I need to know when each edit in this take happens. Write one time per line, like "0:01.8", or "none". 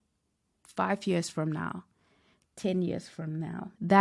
none